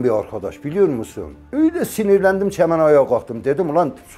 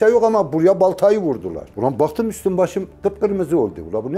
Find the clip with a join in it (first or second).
second